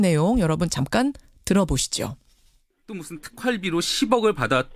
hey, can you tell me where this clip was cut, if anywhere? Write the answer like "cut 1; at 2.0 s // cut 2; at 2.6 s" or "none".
cut 1; at 1.8 s